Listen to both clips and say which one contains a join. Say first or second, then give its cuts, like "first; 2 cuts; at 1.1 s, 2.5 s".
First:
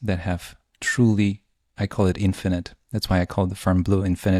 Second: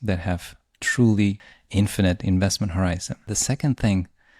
second; 2 cuts; at 1.5 s, 3.3 s